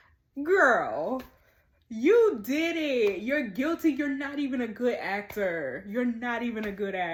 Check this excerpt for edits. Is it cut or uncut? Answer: uncut